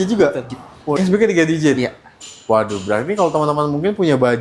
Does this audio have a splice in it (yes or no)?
yes